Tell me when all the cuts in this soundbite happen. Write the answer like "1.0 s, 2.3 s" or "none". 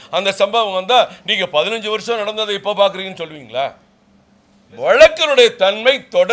none